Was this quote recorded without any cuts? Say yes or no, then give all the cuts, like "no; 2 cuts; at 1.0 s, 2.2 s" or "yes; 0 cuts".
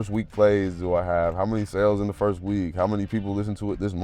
yes; 0 cuts